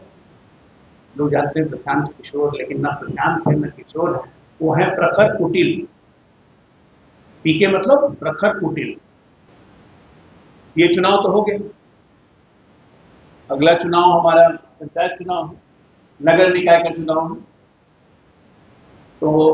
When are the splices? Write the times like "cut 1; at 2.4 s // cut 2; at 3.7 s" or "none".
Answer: cut 1; at 9.5 s